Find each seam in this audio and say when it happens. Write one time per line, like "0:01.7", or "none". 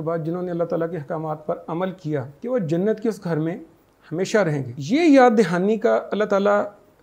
0:02.3
0:04.7

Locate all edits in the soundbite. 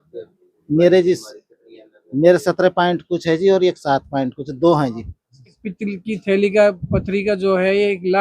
0:05.6

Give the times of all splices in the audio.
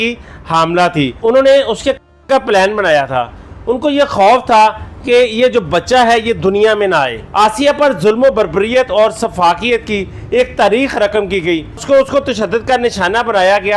0:01.1
0:07.3
0:11.8

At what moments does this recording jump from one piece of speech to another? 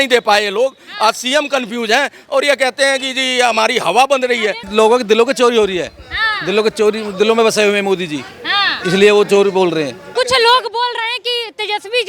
0:04.6
0:10.0

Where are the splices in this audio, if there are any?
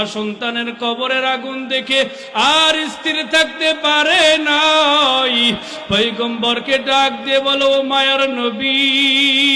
none

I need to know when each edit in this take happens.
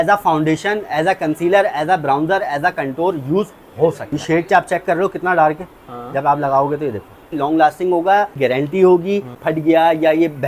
0:04.2
0:07.3
0:08.4
0:09.4

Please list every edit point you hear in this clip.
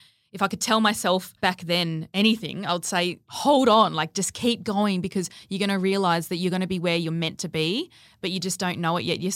0:01.5
0:03.3

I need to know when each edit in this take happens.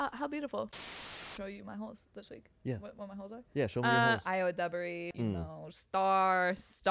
0:01.0
0:04.2
0:05.1

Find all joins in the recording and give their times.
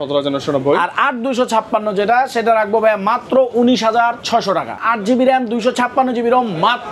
0:04.7

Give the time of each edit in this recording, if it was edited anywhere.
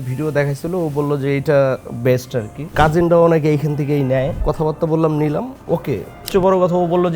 0:02.7
0:04.4
0:06.3

